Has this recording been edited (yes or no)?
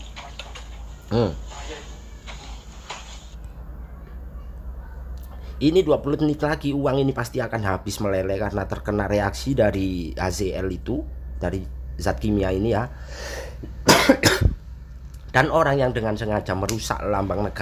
no